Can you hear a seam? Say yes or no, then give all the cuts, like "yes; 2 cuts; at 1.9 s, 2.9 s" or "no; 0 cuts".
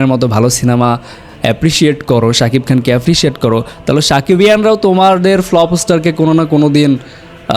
no; 0 cuts